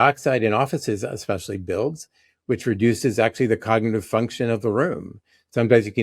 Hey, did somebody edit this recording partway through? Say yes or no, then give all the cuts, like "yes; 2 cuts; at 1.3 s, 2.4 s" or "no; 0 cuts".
no; 0 cuts